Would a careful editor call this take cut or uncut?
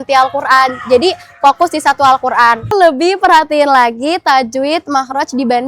cut